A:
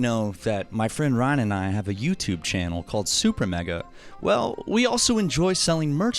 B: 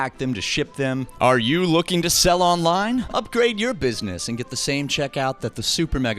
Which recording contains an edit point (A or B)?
B